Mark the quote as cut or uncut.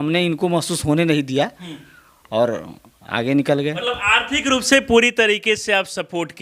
uncut